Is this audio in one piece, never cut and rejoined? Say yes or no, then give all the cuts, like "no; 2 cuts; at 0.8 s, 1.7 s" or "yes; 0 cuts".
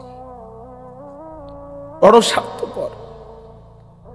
no; 1 cut; at 2.1 s